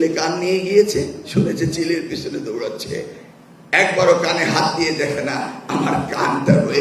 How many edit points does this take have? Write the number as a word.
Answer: zero